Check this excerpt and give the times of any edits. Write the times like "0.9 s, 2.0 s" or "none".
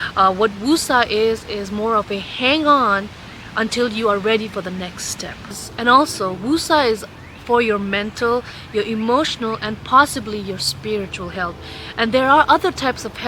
none